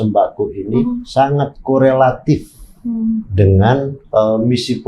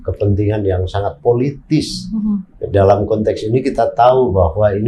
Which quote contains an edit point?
first; 2 cuts; at 1.0 s, 4.0 s

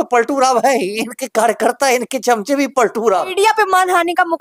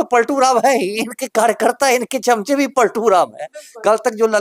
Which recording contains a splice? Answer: first; 1 cut; at 3.3 s

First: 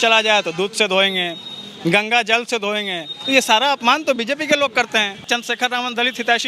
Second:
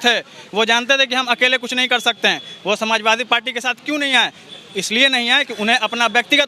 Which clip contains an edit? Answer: first; 1 cut; at 5.3 s

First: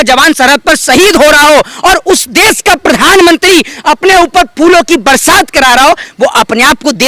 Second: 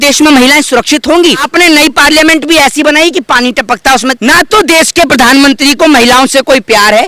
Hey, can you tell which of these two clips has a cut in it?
second; 2 cuts; at 1.4 s, 4.1 s

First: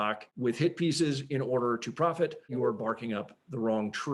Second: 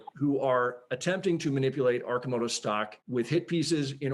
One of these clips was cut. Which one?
first; 1 cut; at 2.5 s

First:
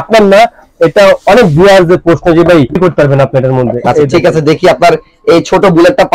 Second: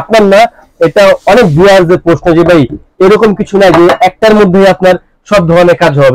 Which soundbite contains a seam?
first; 1 cut; at 2.8 s

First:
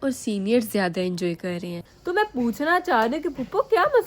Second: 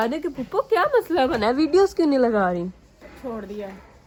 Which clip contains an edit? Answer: first; 1 cut; at 1.8 s

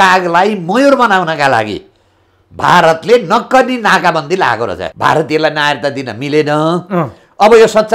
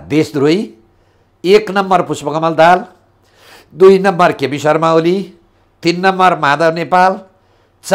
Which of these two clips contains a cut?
first; 1 cut; at 4.8 s

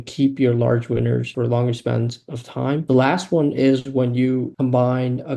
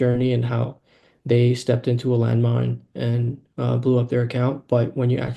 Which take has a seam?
first; 3 cuts; at 1.3 s, 2.8 s, 4.5 s

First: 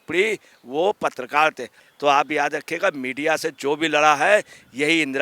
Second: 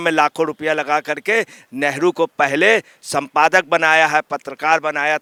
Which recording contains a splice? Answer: first; 1 cut; at 1.7 s

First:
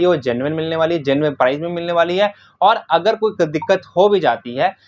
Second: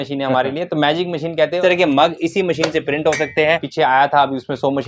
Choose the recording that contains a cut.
second; 2 cuts; at 1.6 s, 3.7 s

